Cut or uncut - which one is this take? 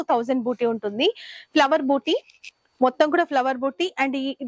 uncut